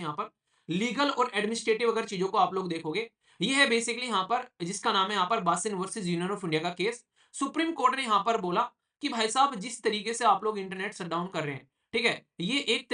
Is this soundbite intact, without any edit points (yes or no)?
yes